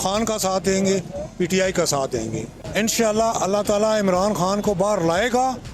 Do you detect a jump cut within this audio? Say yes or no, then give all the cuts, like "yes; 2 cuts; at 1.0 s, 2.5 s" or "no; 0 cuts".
yes; 1 cut; at 2.5 s